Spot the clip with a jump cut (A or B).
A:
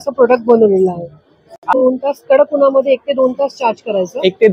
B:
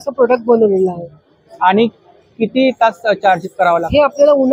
A